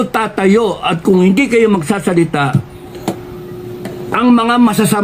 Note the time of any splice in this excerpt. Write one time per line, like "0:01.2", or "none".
none